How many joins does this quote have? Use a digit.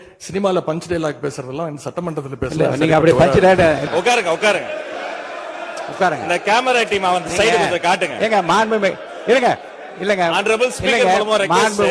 1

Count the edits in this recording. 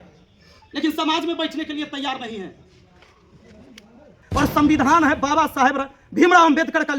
1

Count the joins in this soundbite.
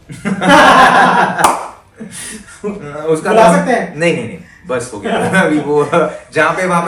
0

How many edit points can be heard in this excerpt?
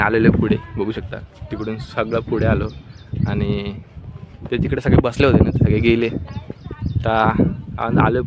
0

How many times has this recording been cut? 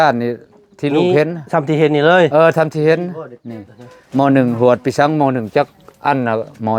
0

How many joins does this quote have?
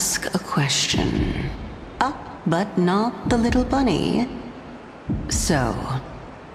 0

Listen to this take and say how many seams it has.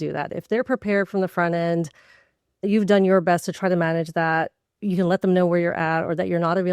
1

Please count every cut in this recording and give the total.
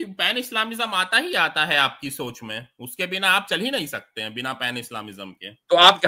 0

